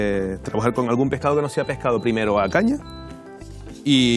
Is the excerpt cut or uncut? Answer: uncut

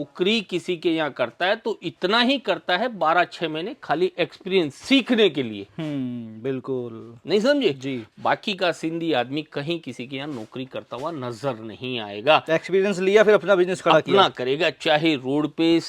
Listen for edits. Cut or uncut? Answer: uncut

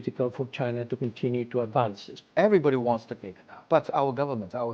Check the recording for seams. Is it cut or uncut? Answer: cut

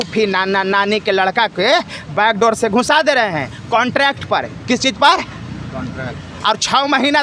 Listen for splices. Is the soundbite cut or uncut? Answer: uncut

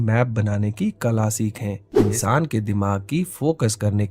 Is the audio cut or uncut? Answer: cut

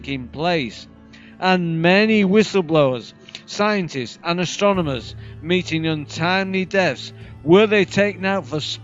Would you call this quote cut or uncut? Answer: cut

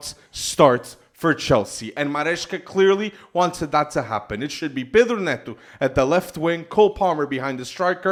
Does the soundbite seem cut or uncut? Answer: uncut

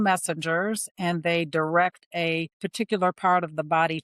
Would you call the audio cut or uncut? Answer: cut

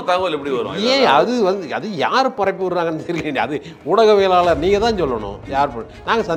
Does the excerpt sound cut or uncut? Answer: uncut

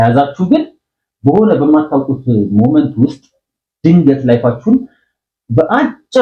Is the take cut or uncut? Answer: uncut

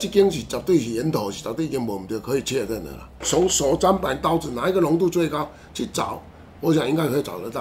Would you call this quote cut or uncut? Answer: cut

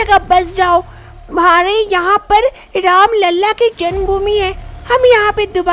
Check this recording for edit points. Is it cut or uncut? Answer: uncut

